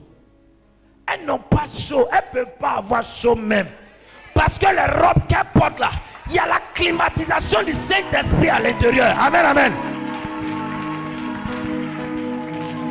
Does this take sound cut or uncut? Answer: uncut